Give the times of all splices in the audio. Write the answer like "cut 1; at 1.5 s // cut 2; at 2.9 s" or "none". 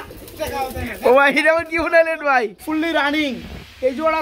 cut 1; at 2.6 s